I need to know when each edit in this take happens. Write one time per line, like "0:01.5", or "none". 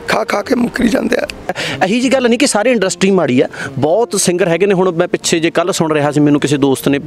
0:01.6